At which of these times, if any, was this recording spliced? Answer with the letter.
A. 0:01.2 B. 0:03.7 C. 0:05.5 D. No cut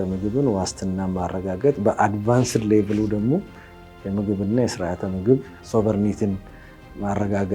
C